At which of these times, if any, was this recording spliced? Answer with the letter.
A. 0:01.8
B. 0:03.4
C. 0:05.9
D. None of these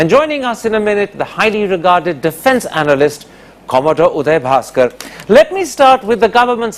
D